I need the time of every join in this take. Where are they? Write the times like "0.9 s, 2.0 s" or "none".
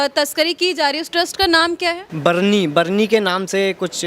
2.1 s